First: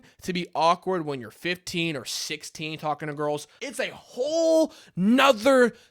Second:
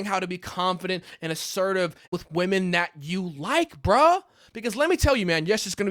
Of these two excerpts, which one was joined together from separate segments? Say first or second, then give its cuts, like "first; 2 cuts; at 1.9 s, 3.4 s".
first; 1 cut; at 3.5 s